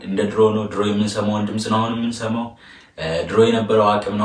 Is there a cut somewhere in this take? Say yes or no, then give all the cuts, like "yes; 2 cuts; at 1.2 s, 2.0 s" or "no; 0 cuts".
no; 0 cuts